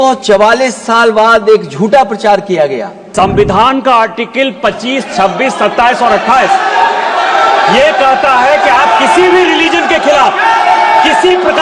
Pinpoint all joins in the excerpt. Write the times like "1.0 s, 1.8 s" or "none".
3.0 s